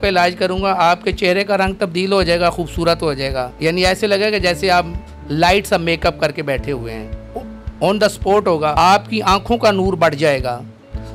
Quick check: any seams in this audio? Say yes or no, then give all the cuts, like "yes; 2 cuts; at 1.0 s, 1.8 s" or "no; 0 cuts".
yes; 2 cuts; at 3.5 s, 8.7 s